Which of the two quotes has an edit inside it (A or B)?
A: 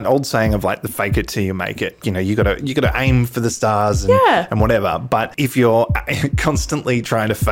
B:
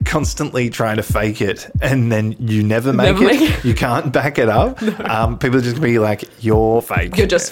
A